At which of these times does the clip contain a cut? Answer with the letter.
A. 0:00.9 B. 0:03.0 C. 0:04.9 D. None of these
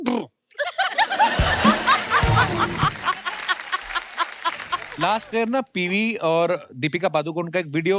C